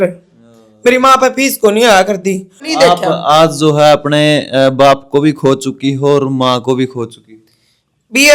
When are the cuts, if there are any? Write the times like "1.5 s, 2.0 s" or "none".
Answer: 2.7 s